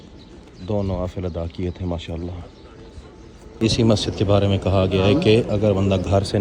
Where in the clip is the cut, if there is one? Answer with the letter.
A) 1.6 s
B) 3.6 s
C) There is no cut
B